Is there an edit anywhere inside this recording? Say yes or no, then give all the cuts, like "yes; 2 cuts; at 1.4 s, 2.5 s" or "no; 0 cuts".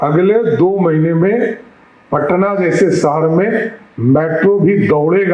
no; 0 cuts